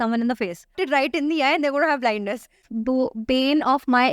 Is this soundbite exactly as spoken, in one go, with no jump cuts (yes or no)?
no